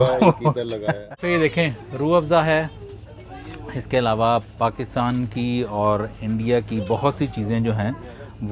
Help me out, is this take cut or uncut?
cut